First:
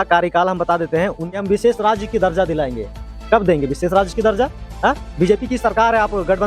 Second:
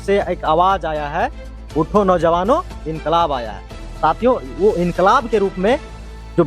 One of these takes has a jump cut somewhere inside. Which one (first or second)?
first